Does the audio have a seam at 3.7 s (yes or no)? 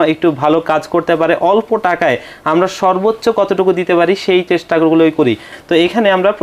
no